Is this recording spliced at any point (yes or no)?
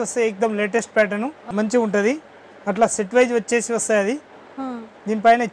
yes